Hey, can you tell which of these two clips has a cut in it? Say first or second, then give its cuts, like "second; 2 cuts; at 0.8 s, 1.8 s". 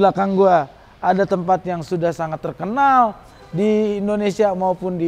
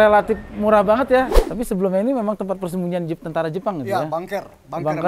second; 1 cut; at 1.4 s